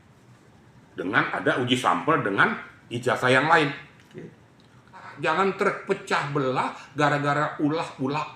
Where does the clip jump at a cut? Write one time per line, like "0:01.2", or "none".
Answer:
0:05.1